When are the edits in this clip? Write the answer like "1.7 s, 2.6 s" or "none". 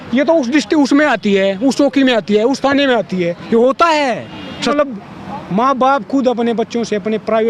4.7 s